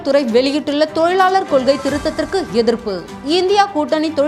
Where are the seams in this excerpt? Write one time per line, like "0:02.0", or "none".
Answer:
none

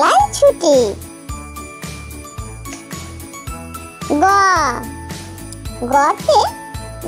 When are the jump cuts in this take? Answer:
none

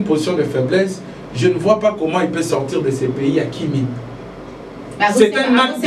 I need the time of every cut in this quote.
none

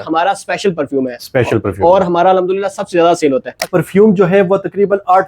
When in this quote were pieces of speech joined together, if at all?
0:03.7

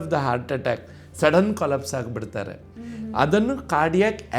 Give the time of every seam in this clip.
0:03.0

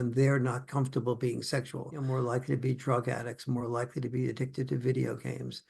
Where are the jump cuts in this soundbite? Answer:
0:02.0

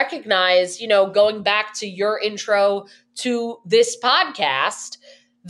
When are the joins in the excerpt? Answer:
none

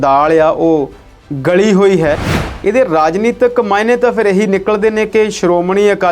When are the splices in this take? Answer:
0:02.3

